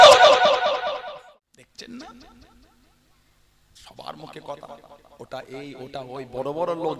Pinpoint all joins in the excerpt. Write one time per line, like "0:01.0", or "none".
0:01.2